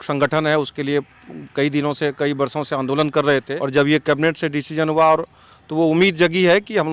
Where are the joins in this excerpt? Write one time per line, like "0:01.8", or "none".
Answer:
0:03.6